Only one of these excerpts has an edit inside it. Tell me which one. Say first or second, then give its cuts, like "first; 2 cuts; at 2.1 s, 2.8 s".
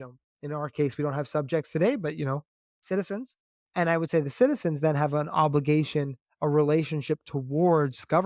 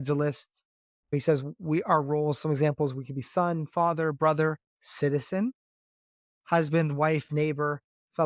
second; 1 cut; at 1.1 s